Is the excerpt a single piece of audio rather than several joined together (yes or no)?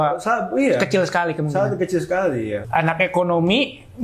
no